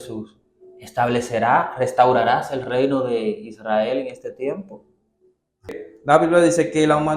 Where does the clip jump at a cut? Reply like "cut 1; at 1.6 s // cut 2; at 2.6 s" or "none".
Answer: cut 1; at 5.8 s